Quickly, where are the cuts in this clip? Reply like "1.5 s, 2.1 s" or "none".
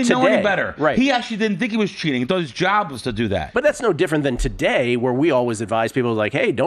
3.5 s